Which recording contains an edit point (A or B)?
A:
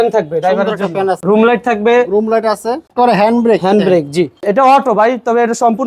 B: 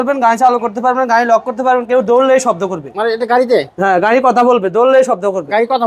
A